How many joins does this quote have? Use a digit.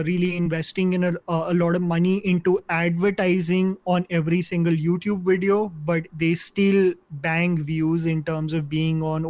1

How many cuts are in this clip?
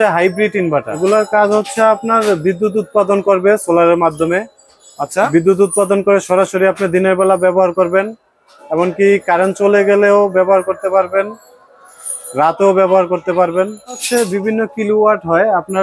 2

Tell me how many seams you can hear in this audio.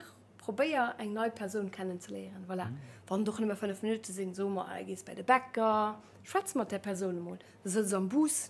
0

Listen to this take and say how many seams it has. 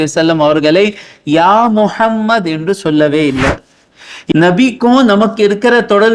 1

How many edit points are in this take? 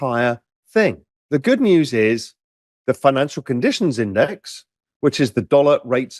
1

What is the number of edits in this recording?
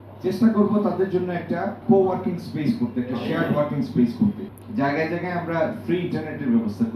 2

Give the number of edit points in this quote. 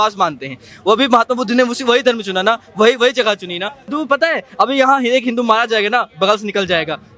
1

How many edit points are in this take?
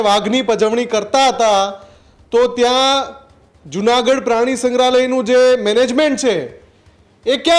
0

